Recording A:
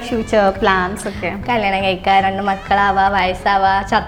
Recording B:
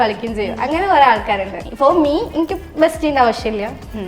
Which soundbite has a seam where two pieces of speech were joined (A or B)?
B